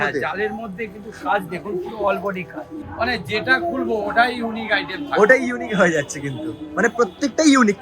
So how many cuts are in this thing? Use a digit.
1